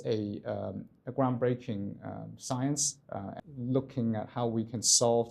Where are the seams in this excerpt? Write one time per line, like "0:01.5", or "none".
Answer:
0:03.4